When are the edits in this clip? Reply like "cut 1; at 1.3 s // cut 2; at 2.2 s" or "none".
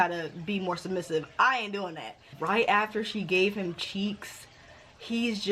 cut 1; at 2.3 s